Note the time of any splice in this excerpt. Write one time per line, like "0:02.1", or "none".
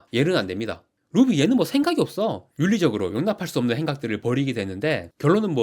0:00.9
0:02.4